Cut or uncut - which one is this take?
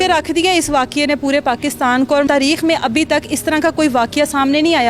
cut